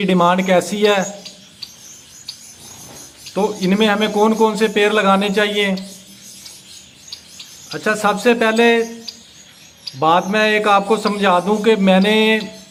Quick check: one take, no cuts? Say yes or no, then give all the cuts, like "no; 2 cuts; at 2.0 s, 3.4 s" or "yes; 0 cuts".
yes; 0 cuts